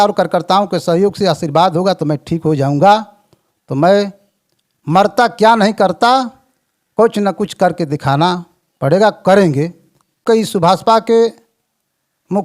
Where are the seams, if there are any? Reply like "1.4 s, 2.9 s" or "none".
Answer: 10.2 s